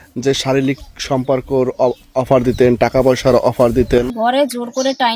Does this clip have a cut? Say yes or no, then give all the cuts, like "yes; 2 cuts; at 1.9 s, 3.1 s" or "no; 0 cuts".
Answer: yes; 1 cut; at 4.1 s